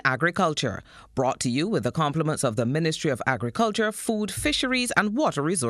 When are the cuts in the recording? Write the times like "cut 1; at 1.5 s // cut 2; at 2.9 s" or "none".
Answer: none